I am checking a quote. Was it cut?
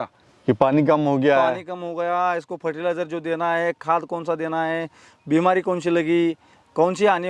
no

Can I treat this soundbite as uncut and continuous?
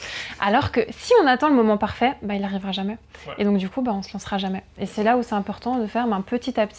yes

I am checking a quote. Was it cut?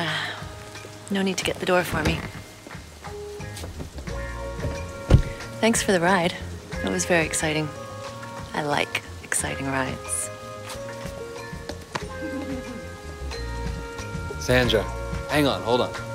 no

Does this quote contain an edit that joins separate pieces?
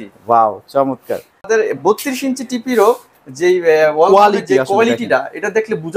yes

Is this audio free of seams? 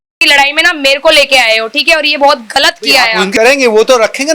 no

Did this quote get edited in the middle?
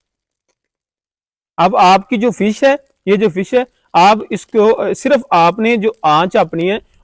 no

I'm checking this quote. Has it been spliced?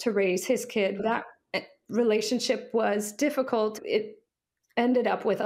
yes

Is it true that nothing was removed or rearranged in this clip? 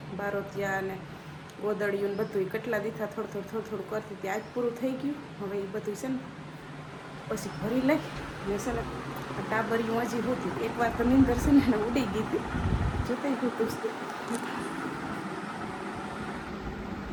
yes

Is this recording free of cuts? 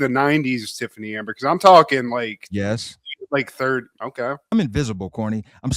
no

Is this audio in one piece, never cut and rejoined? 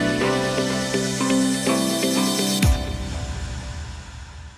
no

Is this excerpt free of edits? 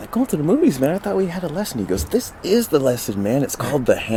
yes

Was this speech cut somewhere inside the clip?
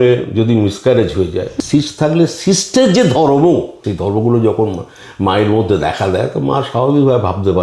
yes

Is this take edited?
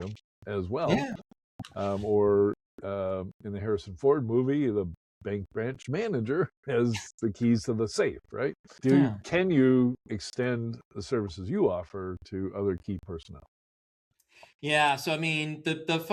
yes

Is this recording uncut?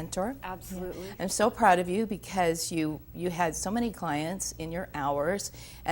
no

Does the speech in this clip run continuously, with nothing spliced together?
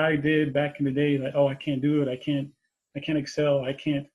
yes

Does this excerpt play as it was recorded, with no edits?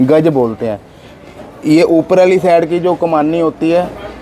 yes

